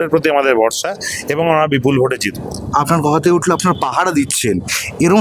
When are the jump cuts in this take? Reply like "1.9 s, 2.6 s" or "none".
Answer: none